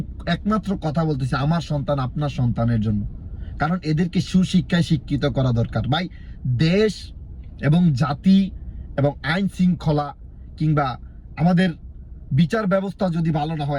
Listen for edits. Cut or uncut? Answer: uncut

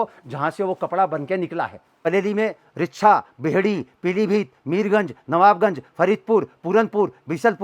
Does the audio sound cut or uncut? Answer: cut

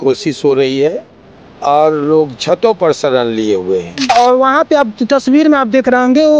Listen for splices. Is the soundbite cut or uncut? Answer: cut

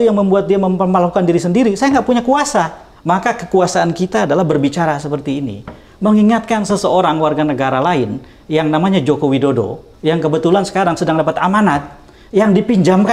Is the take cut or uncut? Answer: cut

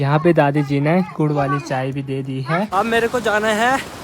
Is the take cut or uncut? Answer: cut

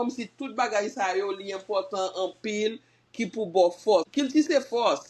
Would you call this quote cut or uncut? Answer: cut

